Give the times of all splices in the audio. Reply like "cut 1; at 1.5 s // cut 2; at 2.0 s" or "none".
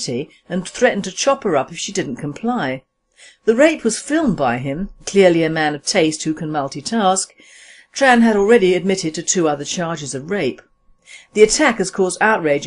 none